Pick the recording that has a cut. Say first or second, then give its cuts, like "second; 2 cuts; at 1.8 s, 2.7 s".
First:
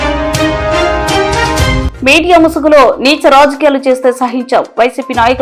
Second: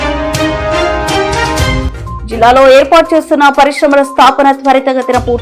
first; 1 cut; at 1.9 s